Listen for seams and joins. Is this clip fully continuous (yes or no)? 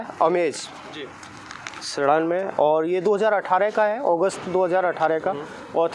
yes